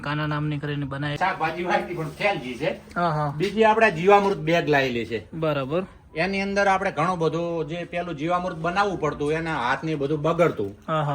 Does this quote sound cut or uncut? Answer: cut